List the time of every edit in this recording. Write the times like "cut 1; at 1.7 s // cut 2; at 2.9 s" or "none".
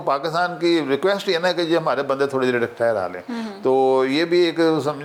none